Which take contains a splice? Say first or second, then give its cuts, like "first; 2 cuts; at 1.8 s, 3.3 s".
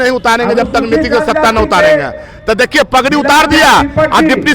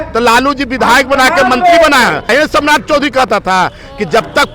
second; 1 cut; at 2.3 s